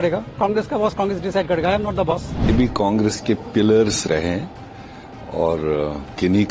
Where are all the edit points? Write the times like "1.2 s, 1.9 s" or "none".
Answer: 2.5 s